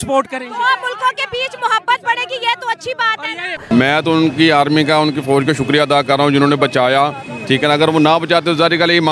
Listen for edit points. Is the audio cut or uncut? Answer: cut